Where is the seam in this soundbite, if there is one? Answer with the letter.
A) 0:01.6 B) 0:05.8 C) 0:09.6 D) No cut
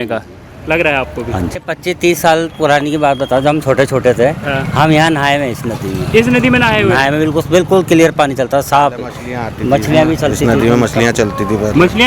A